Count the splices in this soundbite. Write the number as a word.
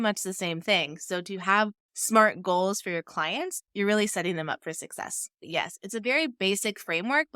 one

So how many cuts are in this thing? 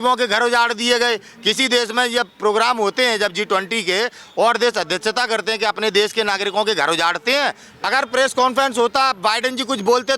one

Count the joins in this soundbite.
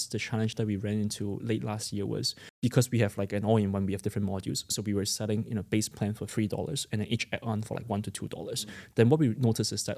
one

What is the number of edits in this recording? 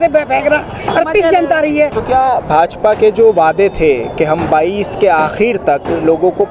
one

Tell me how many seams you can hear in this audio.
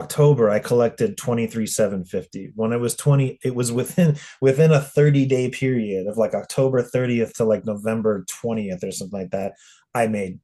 zero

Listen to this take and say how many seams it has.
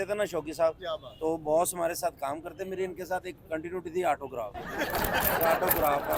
zero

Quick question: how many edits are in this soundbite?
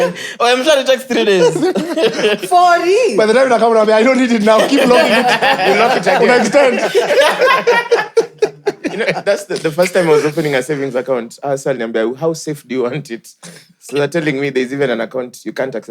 zero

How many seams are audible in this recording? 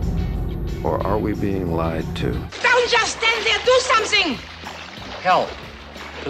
one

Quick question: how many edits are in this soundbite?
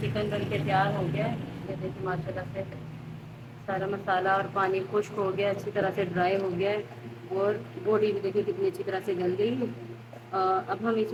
zero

